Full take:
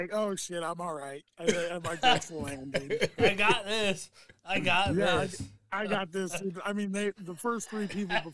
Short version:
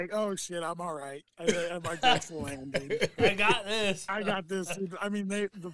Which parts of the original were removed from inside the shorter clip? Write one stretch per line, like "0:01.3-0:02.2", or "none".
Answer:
0:04.1-0:05.7